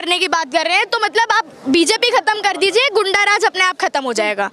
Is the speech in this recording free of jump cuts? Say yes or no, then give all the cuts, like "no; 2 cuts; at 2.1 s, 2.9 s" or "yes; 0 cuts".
yes; 0 cuts